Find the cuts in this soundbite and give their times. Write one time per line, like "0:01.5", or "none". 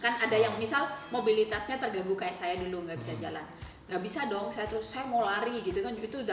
none